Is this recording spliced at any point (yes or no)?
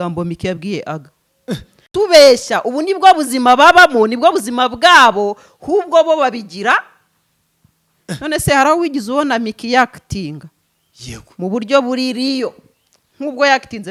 no